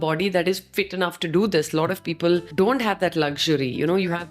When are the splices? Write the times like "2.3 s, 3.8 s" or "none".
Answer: 2.5 s